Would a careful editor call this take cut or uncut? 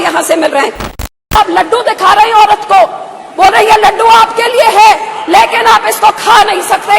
cut